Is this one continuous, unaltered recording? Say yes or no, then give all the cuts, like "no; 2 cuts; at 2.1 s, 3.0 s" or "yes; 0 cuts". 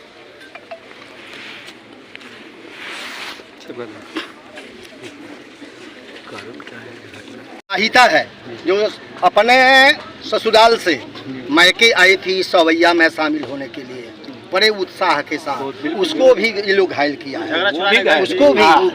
no; 1 cut; at 7.8 s